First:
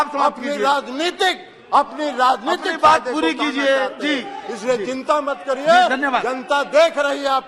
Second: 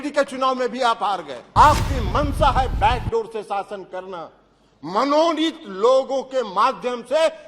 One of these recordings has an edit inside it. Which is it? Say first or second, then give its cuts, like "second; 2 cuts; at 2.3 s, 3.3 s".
second; 1 cut; at 1.4 s